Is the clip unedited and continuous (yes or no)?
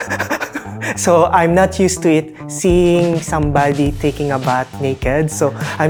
yes